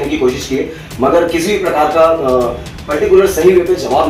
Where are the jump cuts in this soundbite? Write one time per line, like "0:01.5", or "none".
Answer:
none